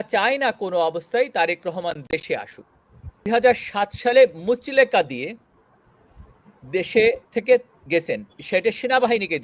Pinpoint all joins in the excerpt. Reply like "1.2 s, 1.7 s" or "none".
3.3 s